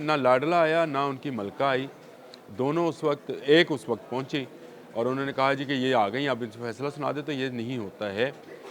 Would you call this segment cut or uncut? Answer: uncut